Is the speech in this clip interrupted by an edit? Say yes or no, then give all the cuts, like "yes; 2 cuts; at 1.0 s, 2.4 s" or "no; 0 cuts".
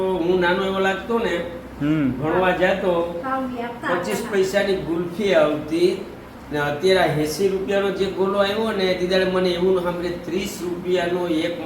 no; 0 cuts